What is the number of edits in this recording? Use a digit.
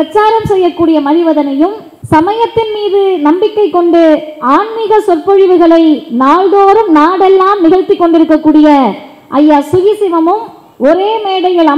1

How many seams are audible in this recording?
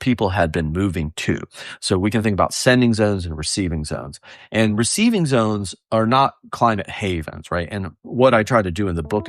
0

